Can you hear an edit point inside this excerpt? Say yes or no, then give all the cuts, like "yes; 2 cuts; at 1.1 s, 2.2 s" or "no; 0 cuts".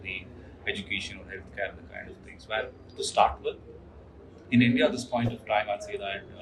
no; 0 cuts